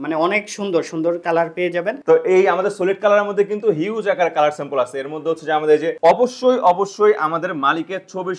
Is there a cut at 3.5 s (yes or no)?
no